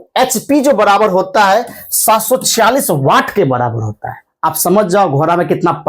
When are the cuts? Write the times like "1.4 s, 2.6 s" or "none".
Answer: none

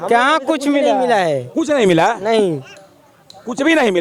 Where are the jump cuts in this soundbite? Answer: none

